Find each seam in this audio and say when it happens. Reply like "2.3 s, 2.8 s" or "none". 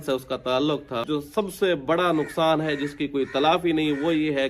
1.0 s